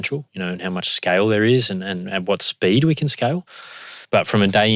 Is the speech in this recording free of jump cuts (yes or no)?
yes